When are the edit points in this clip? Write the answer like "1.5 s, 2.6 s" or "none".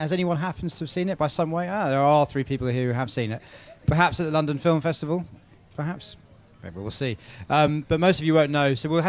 1.0 s